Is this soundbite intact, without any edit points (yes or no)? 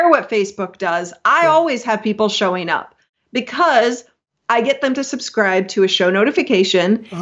yes